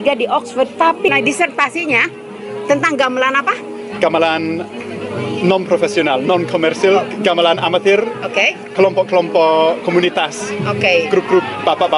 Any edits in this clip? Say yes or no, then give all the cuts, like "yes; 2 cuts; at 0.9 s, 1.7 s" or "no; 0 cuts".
no; 0 cuts